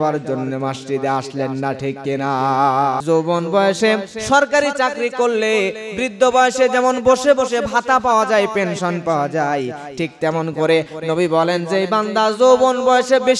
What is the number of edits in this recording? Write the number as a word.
one